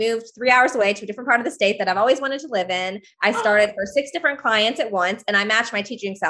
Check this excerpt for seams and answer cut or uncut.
uncut